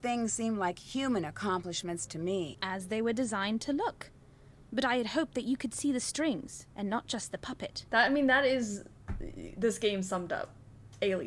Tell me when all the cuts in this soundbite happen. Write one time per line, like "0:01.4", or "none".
0:02.6
0:07.8